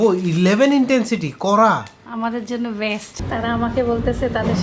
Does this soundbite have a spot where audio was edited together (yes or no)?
yes